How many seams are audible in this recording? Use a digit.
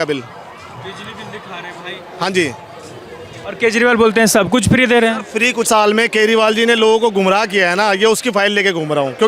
1